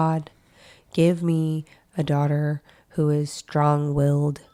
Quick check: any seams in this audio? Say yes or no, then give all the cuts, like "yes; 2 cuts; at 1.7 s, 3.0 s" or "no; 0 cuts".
no; 0 cuts